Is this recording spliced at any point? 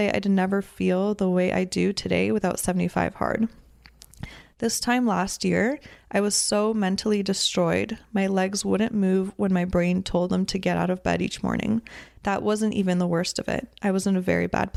no; 0 cuts

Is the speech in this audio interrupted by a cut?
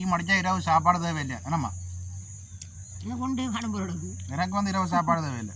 no; 0 cuts

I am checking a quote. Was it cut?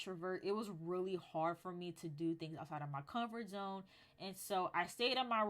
no; 0 cuts

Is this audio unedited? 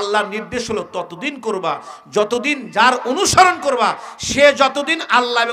yes; 0 cuts

